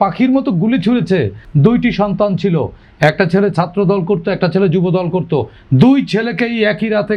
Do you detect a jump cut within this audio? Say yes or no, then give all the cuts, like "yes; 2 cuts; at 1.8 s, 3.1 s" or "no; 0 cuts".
yes; 1 cut; at 1.4 s